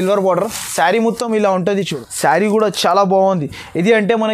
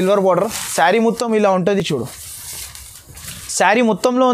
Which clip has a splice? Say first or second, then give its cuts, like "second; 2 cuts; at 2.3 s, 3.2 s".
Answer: first; 1 cut; at 1.9 s